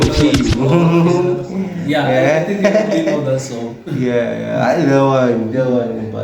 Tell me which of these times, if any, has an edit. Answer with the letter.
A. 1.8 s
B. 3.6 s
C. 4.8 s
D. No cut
D